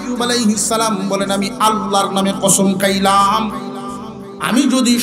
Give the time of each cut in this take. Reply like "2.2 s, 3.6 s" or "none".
none